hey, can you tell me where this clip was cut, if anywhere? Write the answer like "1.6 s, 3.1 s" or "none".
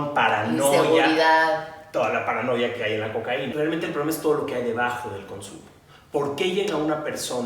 3.5 s

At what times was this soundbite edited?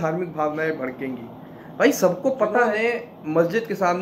2.8 s

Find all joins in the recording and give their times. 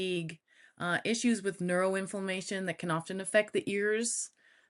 none

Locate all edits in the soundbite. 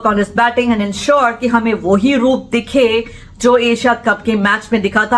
none

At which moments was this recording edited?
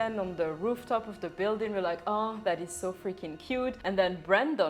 none

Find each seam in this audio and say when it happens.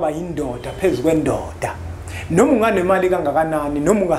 none

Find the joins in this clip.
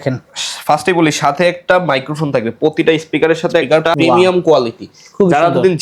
3.7 s

